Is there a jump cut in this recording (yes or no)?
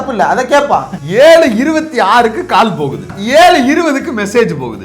yes